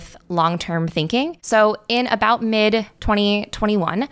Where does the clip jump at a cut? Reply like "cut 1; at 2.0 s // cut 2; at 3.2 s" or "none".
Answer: cut 1; at 1.4 s // cut 2; at 2.9 s